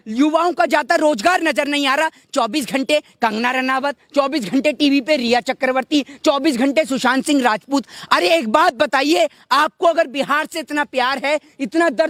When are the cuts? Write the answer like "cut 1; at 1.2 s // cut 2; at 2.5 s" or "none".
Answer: none